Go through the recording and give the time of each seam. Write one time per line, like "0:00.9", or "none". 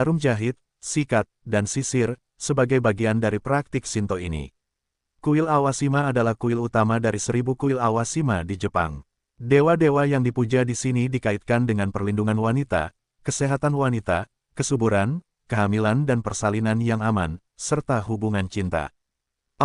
0:05.0

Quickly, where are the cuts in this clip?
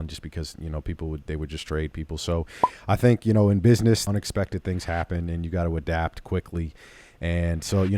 0:04.0

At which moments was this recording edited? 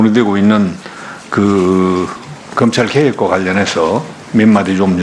0:03.3

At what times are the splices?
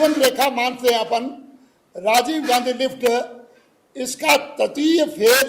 none

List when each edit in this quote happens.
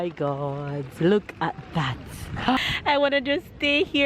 0:02.6

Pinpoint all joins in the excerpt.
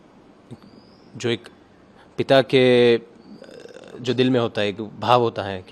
none

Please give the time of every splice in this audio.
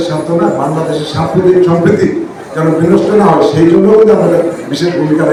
none

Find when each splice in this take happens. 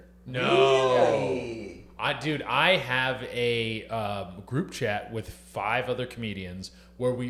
none

